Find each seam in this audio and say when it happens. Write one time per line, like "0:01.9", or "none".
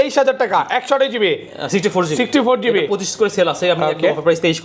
none